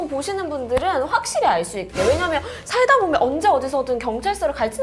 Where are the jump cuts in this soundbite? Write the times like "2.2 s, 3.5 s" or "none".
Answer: none